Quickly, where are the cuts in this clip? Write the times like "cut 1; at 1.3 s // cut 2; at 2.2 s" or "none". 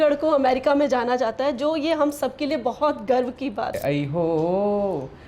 cut 1; at 3.8 s